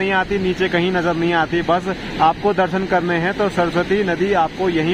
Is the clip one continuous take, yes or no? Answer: yes